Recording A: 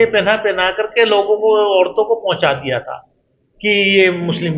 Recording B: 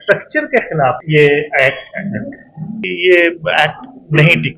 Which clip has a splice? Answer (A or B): B